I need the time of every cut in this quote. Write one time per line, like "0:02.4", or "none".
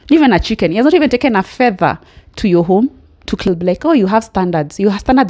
0:03.4

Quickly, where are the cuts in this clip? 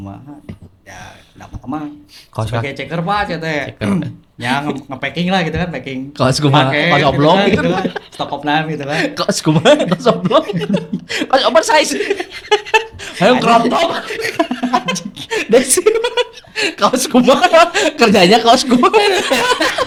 none

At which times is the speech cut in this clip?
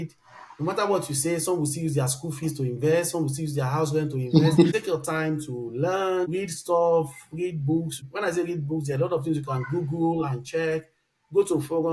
0:04.7
0:06.3

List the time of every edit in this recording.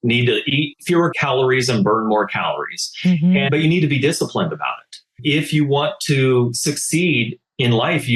0:01.2
0:03.5
0:05.2

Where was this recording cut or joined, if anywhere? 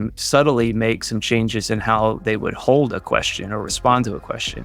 none

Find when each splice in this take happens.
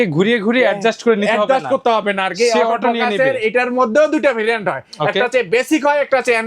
none

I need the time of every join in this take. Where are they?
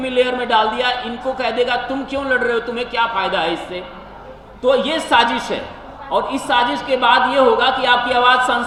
none

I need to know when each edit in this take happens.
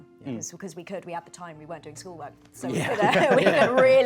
none

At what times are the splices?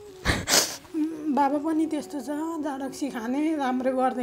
none

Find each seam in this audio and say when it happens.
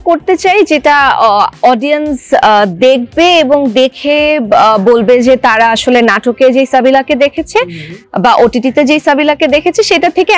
none

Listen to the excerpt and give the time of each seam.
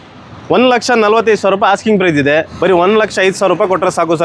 0:02.5

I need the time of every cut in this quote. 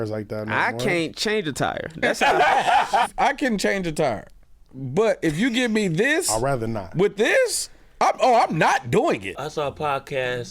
0:03.1
0:09.3

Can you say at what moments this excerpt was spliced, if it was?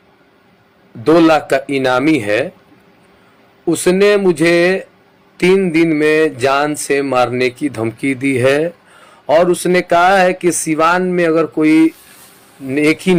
none

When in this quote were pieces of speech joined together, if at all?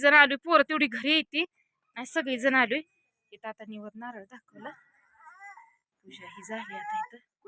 none

